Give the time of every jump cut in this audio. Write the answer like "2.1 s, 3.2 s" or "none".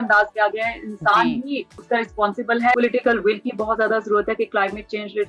1.7 s, 2.8 s